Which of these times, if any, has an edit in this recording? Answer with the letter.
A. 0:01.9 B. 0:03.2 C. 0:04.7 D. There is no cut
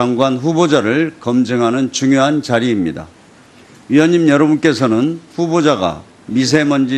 A